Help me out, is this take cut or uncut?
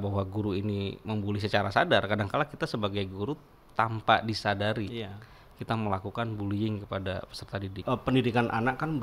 cut